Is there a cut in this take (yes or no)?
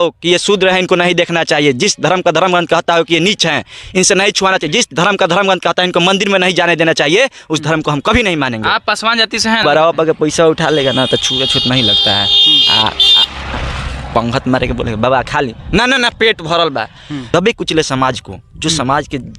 yes